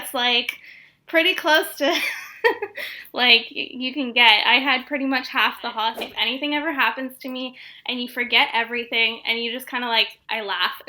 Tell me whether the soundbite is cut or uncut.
cut